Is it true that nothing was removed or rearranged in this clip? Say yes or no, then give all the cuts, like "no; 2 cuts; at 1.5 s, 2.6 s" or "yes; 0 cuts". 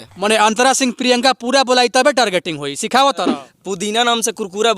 no; 1 cut; at 3.4 s